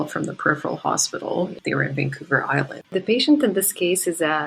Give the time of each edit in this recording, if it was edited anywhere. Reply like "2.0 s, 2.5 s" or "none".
1.6 s, 2.9 s